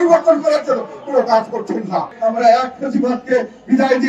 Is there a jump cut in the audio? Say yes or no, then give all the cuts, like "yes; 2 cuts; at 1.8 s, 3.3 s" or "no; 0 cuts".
yes; 1 cut; at 2.1 s